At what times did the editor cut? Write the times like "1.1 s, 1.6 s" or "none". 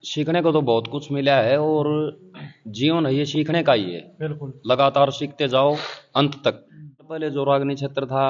7.2 s

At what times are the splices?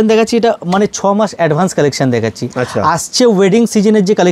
none

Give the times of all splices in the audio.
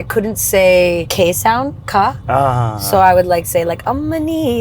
1.1 s

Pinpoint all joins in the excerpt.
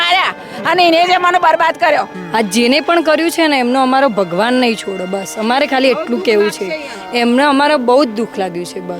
2.2 s

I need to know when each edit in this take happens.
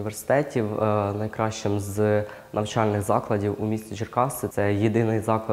none

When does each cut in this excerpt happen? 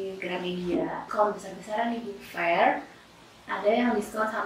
1.1 s

